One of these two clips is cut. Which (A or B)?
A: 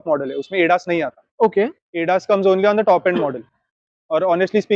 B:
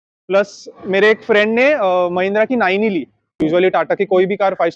B